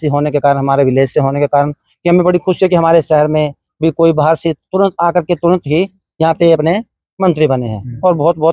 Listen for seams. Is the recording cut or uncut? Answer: uncut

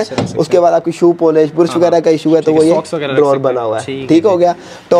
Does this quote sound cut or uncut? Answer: uncut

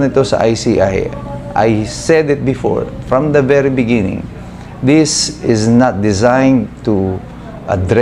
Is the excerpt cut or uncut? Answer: uncut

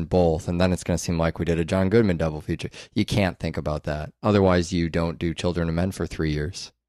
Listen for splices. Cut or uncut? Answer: uncut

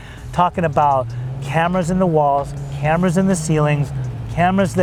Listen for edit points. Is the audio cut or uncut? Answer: uncut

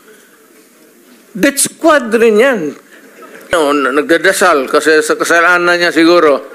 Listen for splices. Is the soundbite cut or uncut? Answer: cut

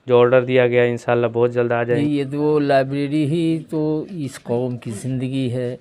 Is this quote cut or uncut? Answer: cut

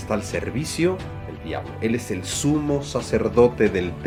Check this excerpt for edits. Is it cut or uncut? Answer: uncut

